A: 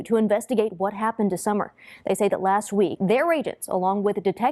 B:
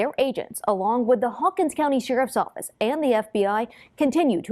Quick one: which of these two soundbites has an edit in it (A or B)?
A